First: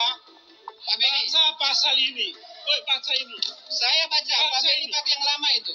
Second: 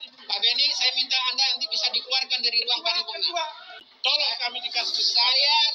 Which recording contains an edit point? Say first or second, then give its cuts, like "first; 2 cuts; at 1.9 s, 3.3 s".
second; 1 cut; at 3.7 s